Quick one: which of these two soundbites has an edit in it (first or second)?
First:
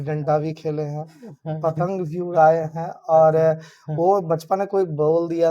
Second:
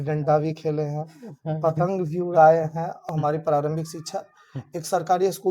second